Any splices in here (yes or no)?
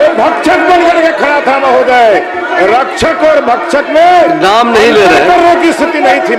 no